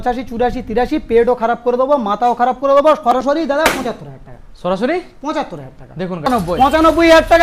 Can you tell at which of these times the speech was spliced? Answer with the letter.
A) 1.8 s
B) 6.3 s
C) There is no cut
B